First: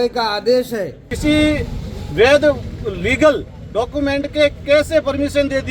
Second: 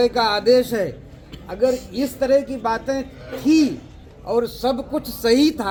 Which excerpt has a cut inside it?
first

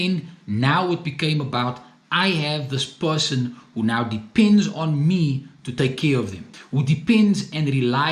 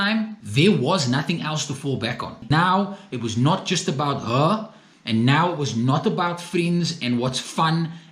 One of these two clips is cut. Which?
second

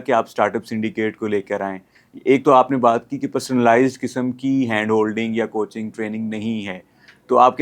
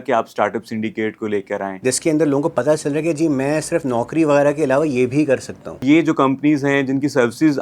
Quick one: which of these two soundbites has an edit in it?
second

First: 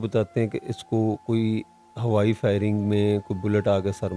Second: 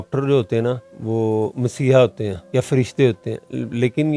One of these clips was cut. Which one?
second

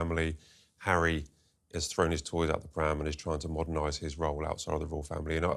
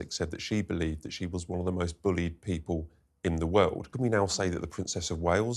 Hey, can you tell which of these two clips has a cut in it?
second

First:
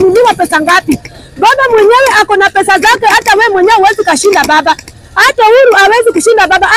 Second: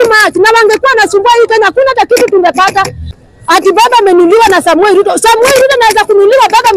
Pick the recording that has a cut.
second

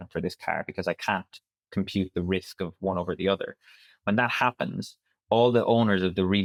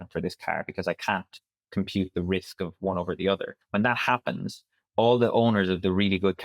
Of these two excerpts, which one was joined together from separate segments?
second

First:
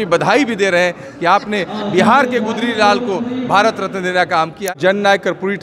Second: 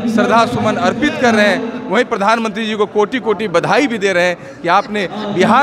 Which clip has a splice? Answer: first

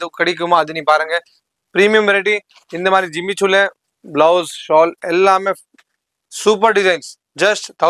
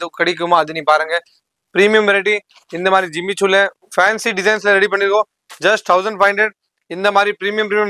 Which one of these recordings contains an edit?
second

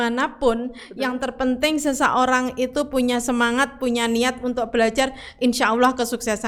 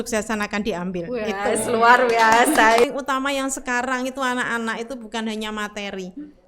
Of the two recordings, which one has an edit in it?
second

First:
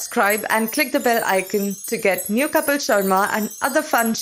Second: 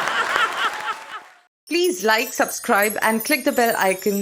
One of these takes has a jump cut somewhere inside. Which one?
second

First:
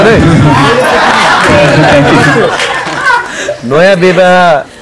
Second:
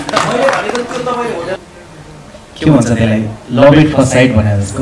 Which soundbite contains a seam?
second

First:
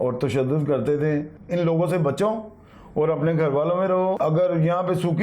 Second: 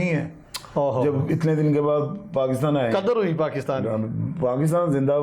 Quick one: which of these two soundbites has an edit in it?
first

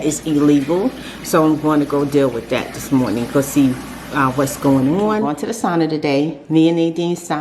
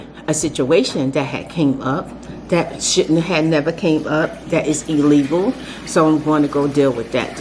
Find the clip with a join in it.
first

